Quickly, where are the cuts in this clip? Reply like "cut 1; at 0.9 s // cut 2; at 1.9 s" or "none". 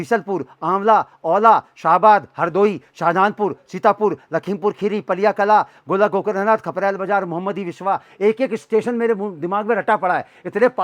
none